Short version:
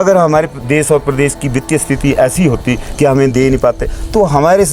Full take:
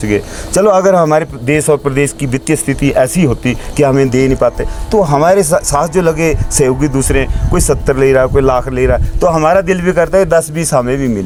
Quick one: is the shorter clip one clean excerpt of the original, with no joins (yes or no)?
yes